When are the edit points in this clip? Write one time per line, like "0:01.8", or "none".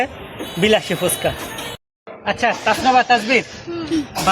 0:01.6

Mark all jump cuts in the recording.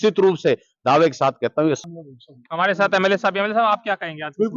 0:01.8

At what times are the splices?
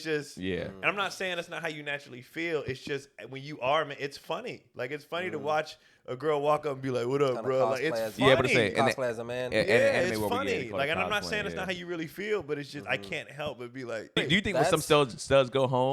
0:04.6
0:14.2

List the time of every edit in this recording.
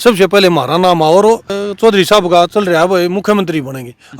0:01.6

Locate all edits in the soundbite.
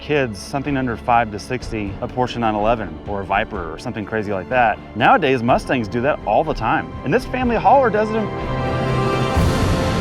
0:02.0
0:04.9
0:06.9
0:08.3

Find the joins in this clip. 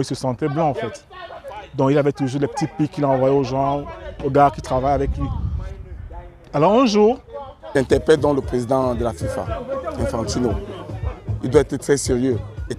0:07.7

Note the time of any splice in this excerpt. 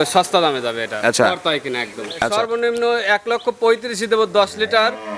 0:02.2

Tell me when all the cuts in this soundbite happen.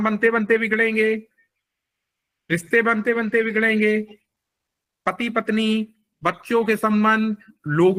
none

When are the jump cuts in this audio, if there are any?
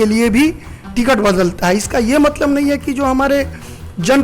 none

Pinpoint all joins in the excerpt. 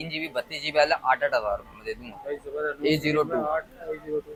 none

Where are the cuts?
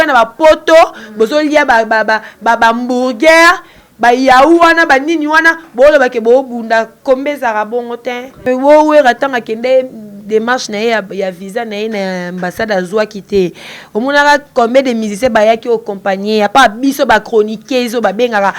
0:08.4

